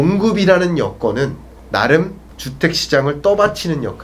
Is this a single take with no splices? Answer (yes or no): yes